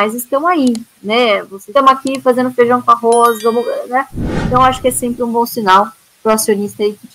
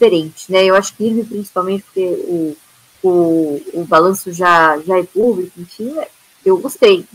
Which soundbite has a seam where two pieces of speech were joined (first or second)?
first